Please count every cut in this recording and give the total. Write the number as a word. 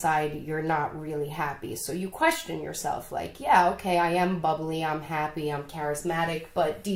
zero